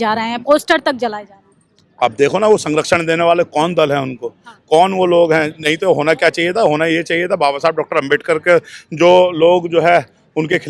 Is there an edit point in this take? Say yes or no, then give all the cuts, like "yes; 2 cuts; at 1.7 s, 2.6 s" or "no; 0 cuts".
no; 0 cuts